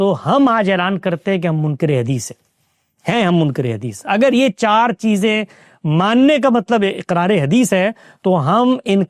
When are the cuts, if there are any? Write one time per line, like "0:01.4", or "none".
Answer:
none

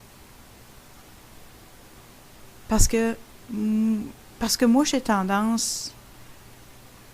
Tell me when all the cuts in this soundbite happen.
0:01.8

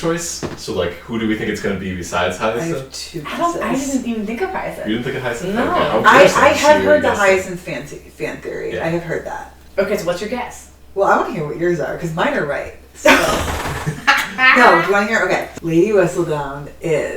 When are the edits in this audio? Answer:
0:15.5

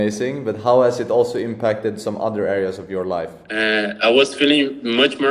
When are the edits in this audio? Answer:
0:03.4

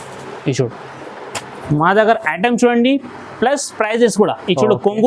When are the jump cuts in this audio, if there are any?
0:01.6

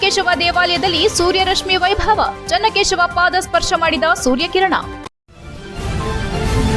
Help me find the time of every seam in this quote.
0:05.1

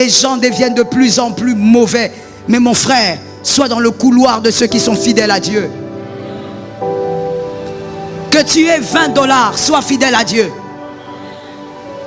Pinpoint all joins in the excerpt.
none

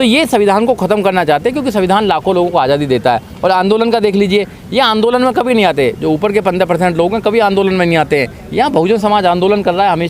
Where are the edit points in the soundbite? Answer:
none

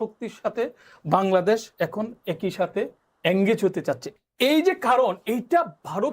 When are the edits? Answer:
0:04.0

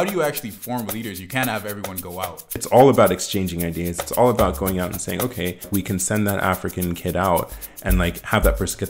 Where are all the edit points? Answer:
0:02.6
0:05.7

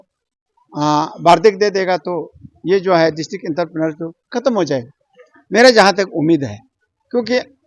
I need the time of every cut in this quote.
none

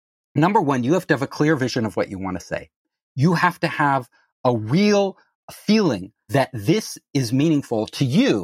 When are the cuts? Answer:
0:05.4
0:06.3

